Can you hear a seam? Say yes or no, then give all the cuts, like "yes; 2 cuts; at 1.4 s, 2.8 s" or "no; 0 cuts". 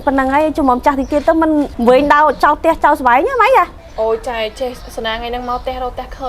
yes; 2 cuts; at 1.7 s, 3.8 s